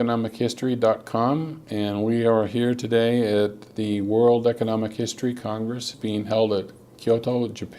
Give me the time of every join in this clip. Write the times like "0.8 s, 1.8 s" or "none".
1.3 s